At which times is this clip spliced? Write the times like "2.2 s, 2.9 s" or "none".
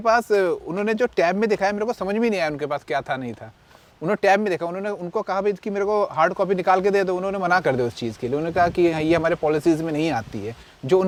none